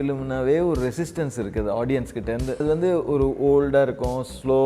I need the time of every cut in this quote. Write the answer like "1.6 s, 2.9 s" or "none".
2.6 s